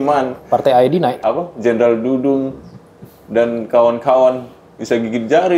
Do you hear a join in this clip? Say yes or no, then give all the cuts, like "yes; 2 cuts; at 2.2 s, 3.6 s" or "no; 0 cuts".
yes; 1 cut; at 1.2 s